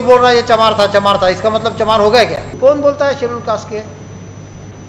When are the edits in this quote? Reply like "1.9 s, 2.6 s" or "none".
2.5 s